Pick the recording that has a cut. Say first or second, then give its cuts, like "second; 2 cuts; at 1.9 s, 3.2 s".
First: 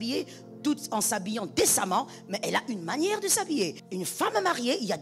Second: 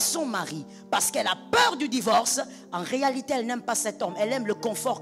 first; 1 cut; at 3.8 s